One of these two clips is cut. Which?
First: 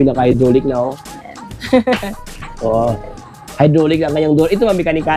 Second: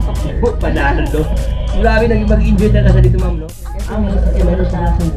second; 1 cut; at 3.3 s

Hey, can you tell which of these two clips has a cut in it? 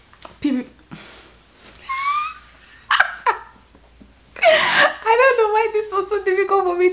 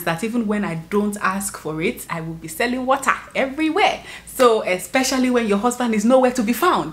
second; 1 cut; at 2.0 s

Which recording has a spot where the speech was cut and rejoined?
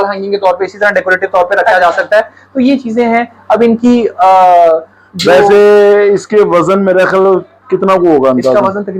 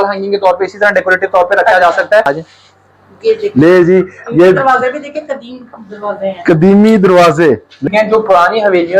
second; 2 cuts; at 2.3 s, 7.9 s

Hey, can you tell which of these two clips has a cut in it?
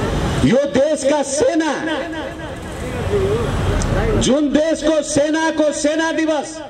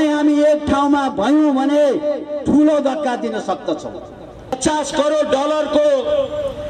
second; 1 cut; at 4.6 s

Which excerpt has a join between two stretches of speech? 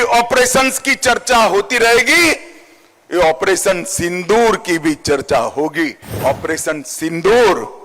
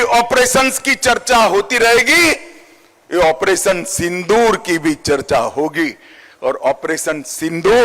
first; 1 cut; at 6.2 s

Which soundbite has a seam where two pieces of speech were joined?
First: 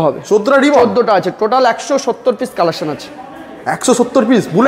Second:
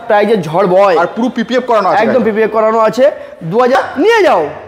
second; 1 cut; at 3.8 s

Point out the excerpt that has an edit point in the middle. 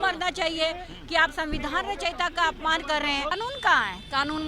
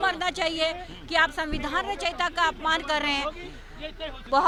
first; 1 cut; at 3.3 s

